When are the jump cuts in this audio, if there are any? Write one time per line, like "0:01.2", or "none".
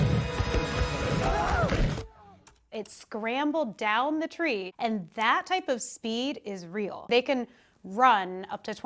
0:02.6
0:07.1